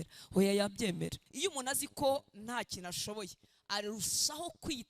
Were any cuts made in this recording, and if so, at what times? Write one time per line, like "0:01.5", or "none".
0:01.2

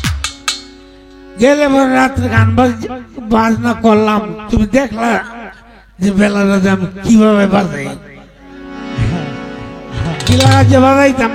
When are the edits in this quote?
none

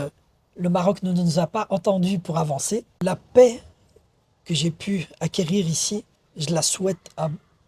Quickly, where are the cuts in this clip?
0:02.9

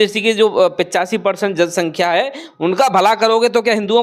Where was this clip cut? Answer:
none

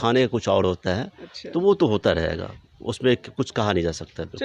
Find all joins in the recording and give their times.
none

